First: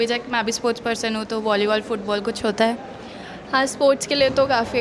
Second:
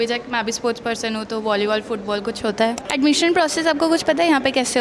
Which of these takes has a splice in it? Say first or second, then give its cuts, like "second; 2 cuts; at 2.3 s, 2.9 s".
second; 1 cut; at 2.8 s